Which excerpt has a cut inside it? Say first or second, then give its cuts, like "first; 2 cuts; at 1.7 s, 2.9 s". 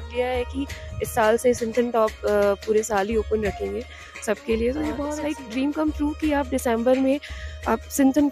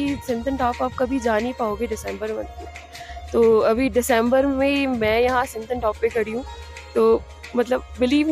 first; 1 cut; at 5.2 s